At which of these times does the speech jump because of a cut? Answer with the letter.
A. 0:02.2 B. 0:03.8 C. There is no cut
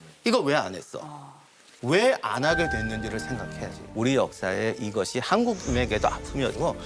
B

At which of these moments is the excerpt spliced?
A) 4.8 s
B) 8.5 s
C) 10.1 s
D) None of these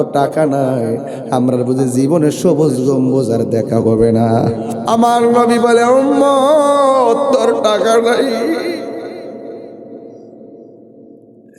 A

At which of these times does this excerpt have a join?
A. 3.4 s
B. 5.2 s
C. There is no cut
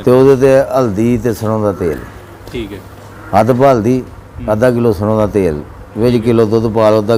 C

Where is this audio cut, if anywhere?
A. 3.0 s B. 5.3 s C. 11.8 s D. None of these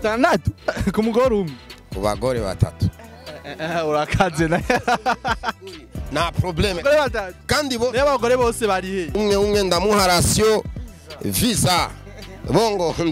D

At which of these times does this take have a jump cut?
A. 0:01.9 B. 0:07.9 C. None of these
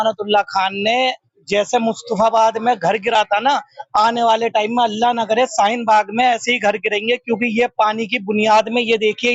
C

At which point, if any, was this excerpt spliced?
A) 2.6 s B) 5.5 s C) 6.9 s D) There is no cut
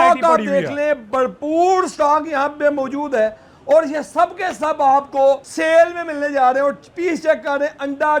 B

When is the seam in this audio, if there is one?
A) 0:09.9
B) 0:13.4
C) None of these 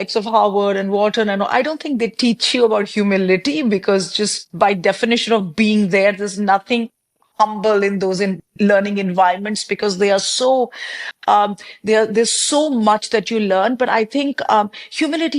C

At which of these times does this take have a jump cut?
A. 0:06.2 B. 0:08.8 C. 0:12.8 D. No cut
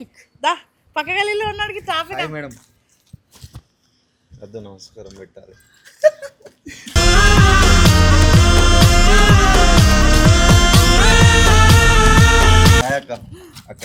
D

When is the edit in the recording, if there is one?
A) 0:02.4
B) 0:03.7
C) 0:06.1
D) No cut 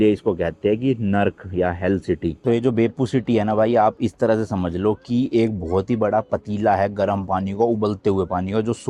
A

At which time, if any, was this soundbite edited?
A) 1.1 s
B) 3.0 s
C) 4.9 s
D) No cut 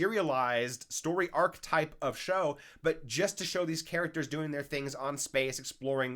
D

